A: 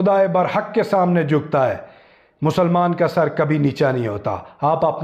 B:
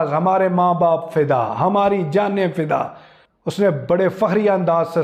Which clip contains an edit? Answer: B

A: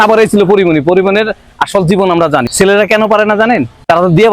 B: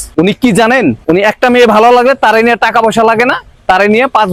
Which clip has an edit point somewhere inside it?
A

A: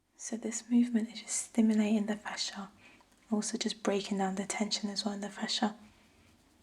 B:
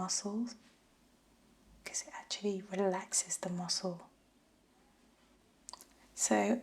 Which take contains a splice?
B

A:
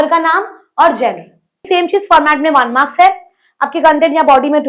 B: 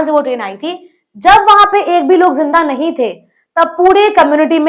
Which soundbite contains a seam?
A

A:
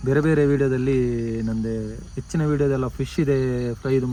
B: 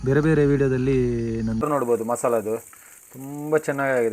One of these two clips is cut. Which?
B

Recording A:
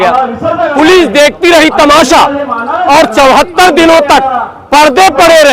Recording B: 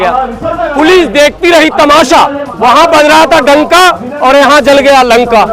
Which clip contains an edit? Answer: B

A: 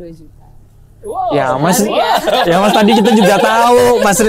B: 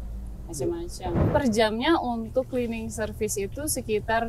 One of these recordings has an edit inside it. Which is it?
B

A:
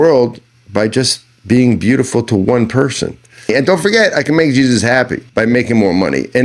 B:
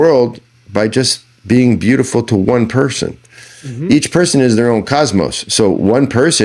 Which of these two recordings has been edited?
A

